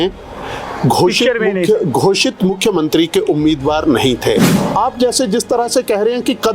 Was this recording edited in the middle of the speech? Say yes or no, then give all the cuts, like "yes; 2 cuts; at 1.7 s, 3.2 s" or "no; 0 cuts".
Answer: yes; 1 cut; at 4.5 s